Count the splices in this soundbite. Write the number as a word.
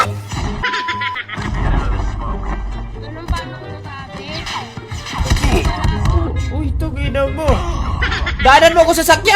one